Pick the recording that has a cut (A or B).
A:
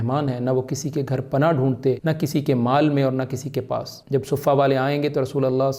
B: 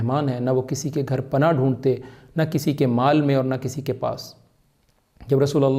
A